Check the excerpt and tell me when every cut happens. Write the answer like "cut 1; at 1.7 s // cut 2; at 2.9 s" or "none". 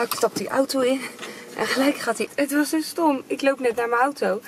cut 1; at 2.3 s